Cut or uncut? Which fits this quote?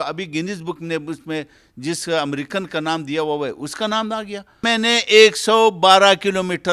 cut